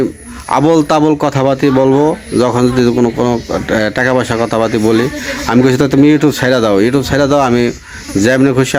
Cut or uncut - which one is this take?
uncut